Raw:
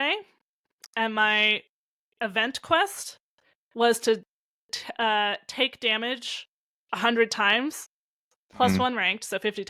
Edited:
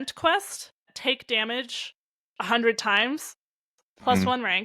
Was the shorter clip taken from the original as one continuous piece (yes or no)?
no